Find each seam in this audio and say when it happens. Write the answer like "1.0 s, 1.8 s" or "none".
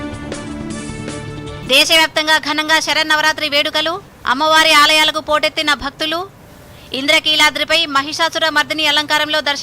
1.0 s

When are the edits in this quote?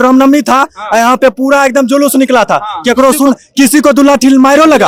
none

